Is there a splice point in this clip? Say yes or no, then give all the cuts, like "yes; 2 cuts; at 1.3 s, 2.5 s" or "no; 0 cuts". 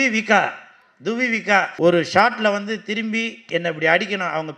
yes; 1 cut; at 1.7 s